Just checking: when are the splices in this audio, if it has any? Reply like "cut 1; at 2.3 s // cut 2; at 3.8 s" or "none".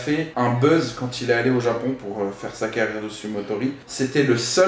cut 1; at 3.8 s